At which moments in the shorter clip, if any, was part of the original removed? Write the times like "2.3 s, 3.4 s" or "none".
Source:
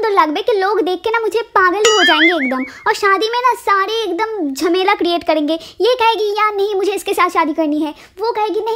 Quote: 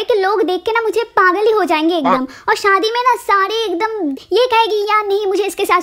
4.2 s